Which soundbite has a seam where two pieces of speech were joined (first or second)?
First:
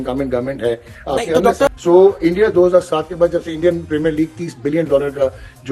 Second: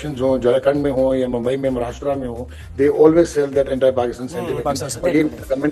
first